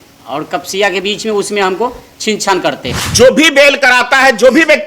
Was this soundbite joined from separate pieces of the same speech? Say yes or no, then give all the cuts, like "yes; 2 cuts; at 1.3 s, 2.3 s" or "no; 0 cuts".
yes; 1 cut; at 2.9 s